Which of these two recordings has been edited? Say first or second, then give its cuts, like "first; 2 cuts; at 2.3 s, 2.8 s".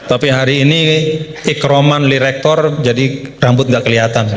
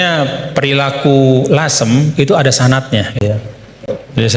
second; 1 cut; at 3.2 s